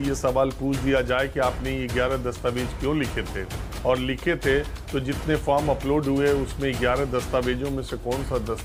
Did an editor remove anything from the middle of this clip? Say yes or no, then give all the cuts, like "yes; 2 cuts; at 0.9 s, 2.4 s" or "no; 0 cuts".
no; 0 cuts